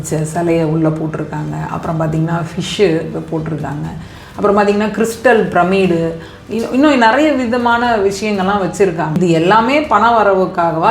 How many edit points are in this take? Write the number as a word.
one